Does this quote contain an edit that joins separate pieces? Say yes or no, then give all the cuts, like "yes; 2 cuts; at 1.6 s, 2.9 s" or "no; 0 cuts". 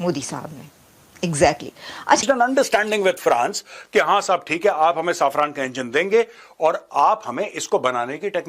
yes; 1 cut; at 2.2 s